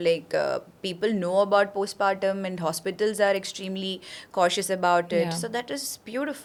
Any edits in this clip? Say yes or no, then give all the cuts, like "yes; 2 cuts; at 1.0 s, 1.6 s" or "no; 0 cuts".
no; 0 cuts